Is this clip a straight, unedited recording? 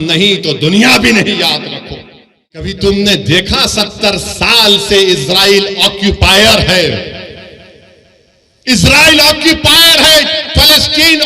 no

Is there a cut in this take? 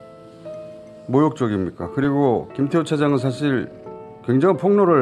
no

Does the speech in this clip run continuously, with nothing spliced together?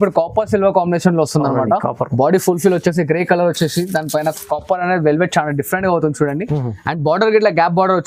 yes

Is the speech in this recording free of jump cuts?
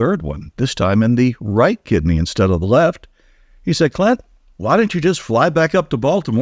yes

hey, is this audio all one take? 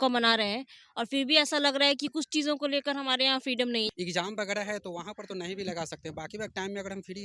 no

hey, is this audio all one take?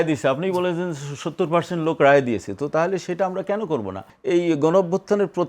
no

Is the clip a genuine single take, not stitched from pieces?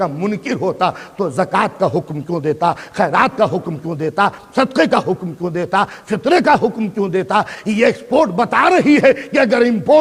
yes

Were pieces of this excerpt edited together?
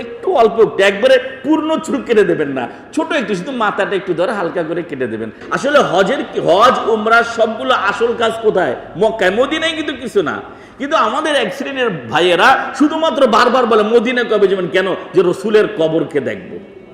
yes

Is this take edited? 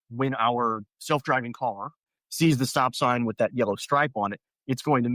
yes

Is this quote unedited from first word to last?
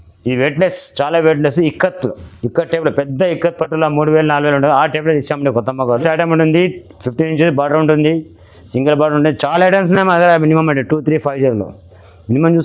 no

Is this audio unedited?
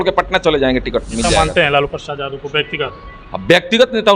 no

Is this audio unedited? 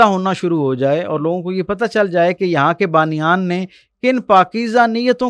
yes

